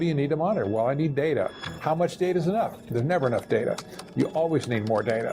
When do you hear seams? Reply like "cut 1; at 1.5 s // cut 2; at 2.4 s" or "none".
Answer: cut 1; at 1.6 s // cut 2; at 2.8 s